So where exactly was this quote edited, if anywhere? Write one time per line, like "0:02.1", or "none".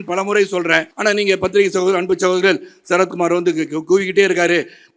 0:00.9